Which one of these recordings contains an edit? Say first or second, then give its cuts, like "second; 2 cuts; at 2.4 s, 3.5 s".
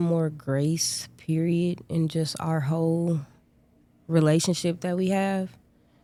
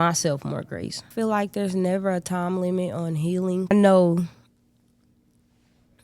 second; 2 cuts; at 1.1 s, 3.7 s